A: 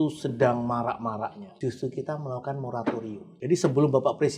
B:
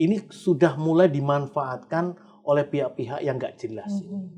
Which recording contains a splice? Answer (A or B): A